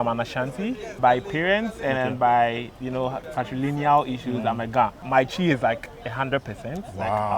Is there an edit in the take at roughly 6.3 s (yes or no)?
no